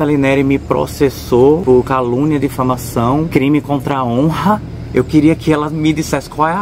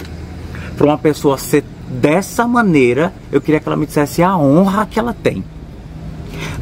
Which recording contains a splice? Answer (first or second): first